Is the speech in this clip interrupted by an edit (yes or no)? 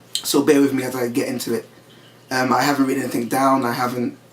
yes